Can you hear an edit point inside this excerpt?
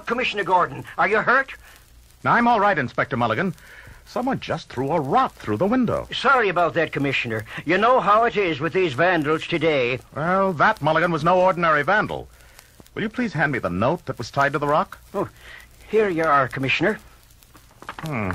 no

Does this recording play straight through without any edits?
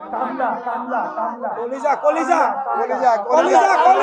yes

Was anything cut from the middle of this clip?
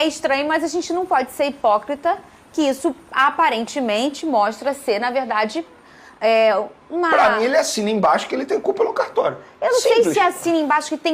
no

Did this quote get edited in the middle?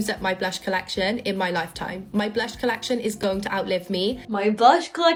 no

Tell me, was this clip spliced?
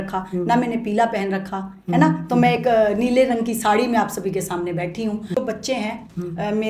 yes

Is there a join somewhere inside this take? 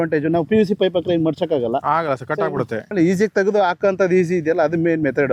no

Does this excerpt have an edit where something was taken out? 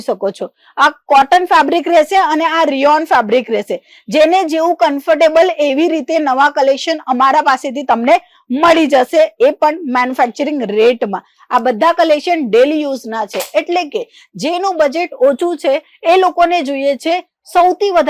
no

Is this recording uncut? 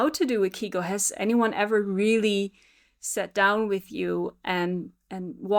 yes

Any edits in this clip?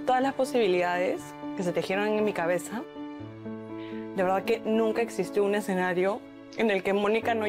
no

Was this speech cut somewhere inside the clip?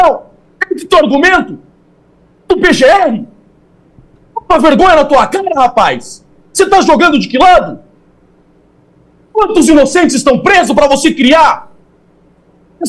no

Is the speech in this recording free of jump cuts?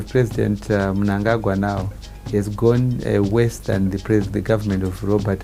yes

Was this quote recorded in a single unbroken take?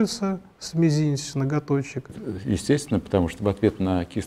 no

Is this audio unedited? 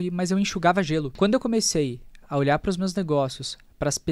no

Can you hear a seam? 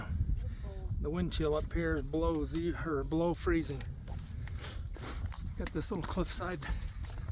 no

